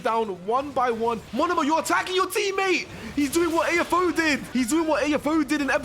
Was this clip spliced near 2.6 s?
no; 2 cuts; at 1.3 s, 4.4 s

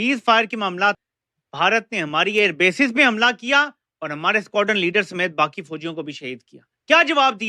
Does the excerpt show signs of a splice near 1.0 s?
yes; 1 cut; at 1.0 s

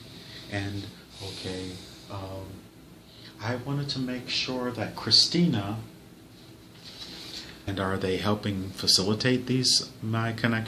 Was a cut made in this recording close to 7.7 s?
no; 0 cuts

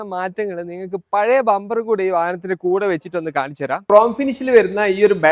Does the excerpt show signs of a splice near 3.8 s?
yes; 1 cut; at 3.8 s

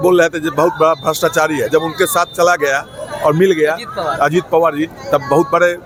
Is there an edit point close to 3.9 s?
no; 0 cuts

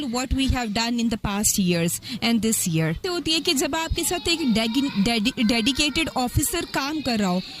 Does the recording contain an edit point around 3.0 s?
yes; 1 cut; at 3.0 s

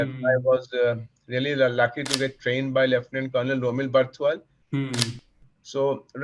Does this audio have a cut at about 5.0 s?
yes; 1 cut; at 5.0 s

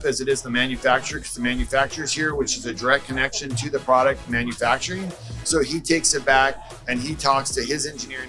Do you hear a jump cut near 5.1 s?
no; 0 cuts

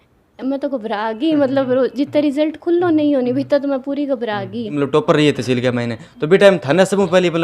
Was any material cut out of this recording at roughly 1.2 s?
no; 1 cut; at 4.7 s

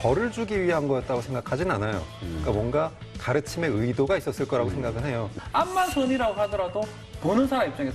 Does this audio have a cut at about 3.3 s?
no; 1 cut; at 2.0 s

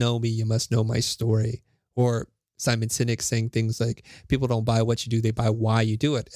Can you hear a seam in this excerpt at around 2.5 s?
no; 0 cuts

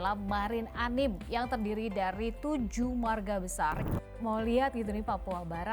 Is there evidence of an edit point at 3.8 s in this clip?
yes; 1 cut; at 3.8 s

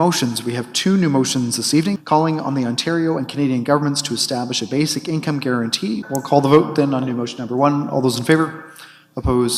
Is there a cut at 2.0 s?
yes; 2 cuts; at 2.0 s, 6.0 s

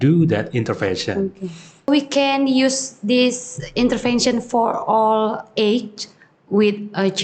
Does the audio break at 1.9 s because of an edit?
yes; 1 cut; at 1.9 s

